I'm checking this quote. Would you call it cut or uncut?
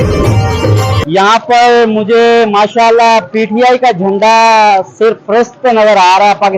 cut